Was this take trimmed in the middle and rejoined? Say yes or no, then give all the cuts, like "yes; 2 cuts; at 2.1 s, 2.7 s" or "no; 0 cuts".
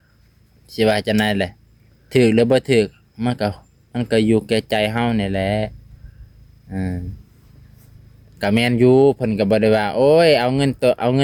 no; 0 cuts